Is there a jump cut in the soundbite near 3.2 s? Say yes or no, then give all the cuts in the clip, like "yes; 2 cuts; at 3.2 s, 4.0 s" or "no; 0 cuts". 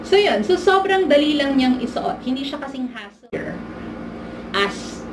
yes; 1 cut; at 3.2 s